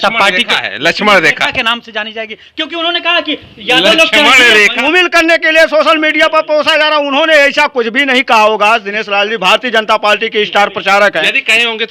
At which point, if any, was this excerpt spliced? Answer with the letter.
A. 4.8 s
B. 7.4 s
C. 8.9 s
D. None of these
A